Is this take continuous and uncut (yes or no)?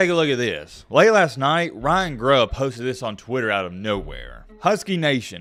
yes